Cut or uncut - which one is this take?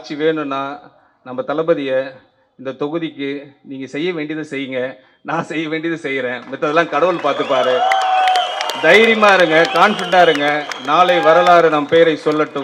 uncut